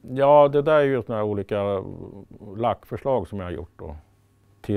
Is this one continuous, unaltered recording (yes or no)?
yes